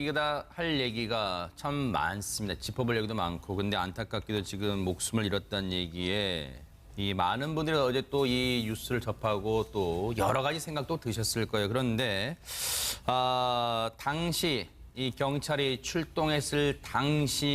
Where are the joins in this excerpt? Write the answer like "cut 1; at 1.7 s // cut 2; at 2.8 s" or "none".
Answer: cut 1; at 5.7 s